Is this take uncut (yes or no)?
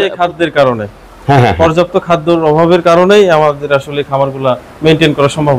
yes